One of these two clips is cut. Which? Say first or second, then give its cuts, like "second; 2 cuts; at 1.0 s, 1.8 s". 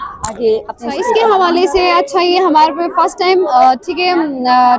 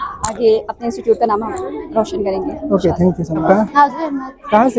first; 1 cut; at 1.0 s